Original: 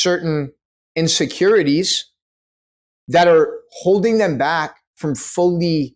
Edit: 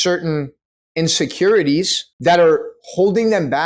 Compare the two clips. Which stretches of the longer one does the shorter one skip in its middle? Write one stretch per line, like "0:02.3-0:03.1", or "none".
0:02.0-0:02.9